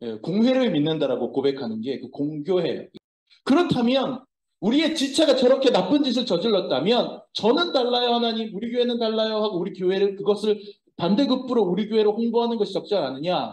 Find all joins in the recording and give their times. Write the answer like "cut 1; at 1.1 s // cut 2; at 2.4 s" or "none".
cut 1; at 2.9 s